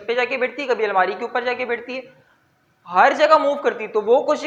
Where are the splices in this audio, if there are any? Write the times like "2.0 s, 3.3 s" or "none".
none